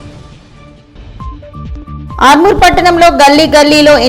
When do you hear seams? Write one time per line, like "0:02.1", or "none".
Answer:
none